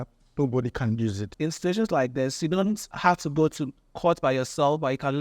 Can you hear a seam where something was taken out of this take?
yes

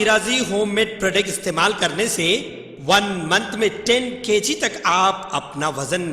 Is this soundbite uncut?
yes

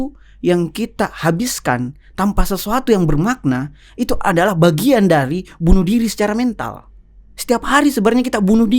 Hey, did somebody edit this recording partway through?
no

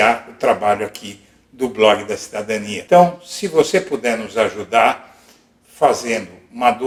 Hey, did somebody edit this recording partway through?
no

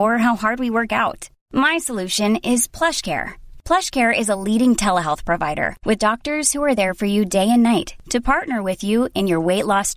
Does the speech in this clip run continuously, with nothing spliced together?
yes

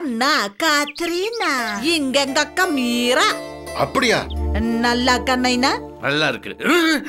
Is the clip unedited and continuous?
no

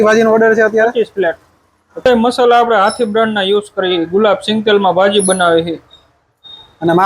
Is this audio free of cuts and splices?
no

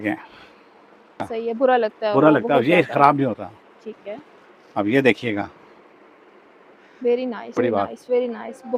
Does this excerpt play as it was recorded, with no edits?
no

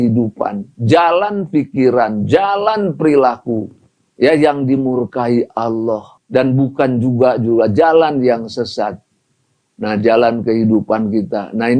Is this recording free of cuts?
no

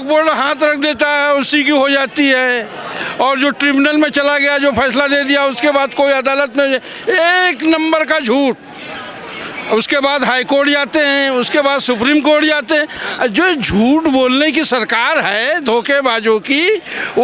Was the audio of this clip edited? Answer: no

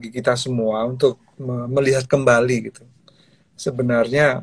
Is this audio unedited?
yes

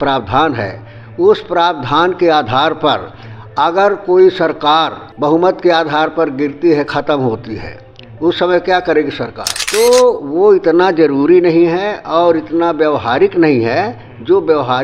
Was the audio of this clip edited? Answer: yes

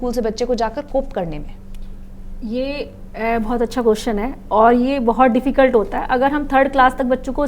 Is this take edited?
no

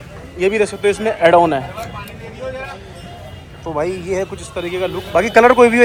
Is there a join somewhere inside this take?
no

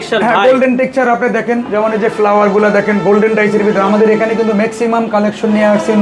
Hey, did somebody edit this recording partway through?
no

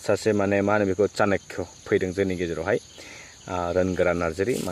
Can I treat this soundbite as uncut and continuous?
yes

